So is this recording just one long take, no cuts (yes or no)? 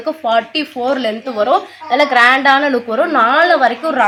yes